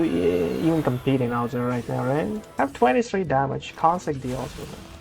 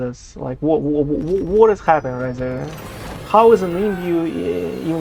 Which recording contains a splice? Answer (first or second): first